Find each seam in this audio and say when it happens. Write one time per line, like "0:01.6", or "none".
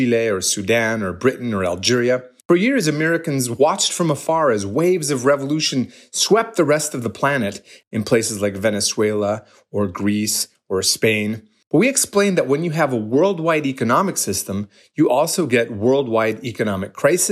0:02.3
0:07.7
0:11.5